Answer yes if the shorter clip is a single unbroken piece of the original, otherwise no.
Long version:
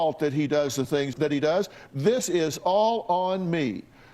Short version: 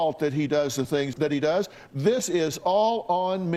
yes